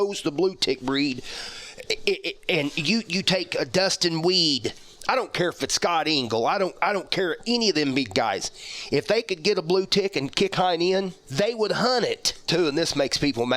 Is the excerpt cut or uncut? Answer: cut